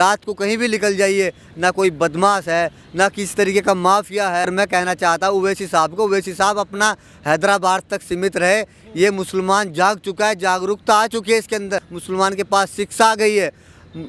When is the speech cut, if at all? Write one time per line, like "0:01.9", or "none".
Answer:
0:04.4